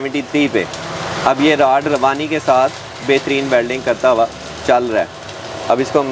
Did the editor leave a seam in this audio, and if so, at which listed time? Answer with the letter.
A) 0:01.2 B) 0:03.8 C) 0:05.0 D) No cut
D